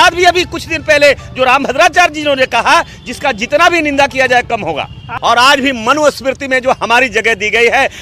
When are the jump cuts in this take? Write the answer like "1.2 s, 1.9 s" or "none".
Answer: 5.1 s